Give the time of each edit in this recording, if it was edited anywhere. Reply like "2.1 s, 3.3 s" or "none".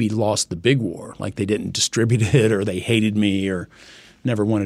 none